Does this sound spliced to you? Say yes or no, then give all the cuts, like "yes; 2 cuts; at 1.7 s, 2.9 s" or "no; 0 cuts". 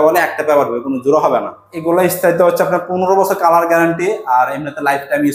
yes; 1 cut; at 1.7 s